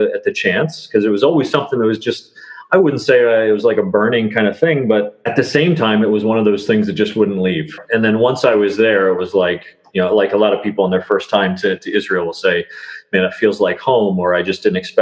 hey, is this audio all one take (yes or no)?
no